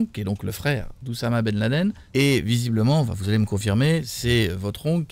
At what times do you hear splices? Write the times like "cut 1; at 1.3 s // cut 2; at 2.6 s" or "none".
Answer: cut 1; at 2.0 s